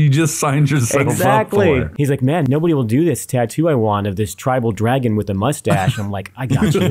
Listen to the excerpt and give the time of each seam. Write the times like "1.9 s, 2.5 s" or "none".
1.9 s